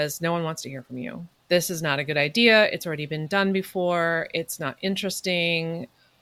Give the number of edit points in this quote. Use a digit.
0